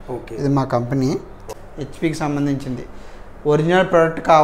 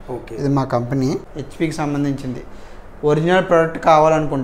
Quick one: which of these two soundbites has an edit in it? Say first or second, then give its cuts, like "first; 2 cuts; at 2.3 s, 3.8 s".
second; 1 cut; at 1.4 s